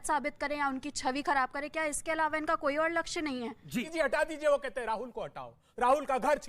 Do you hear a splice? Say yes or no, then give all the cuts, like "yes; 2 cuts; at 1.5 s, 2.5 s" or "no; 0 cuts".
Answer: yes; 1 cut; at 3.9 s